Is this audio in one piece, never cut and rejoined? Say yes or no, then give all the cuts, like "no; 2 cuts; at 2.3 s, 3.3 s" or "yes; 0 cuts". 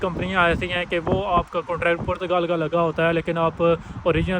yes; 0 cuts